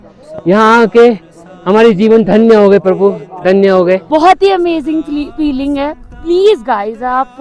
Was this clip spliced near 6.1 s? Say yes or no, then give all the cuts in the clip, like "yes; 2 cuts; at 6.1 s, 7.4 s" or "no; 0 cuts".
no; 1 cut; at 4.0 s